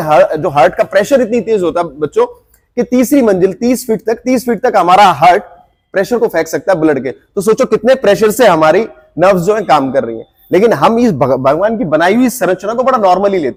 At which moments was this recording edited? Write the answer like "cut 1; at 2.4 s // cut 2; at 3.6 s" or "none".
none